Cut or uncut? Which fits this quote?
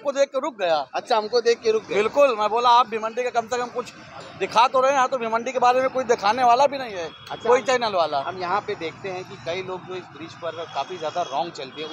uncut